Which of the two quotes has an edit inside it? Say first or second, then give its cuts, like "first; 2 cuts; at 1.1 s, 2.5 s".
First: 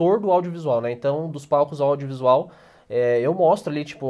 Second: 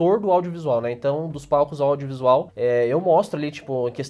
second; 1 cut; at 2.5 s